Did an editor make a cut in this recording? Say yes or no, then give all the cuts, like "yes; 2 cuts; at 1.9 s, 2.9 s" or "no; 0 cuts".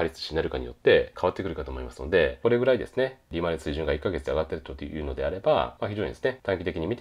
yes; 3 cuts; at 1.1 s, 2.4 s, 6.0 s